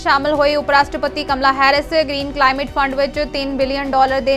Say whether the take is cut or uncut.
uncut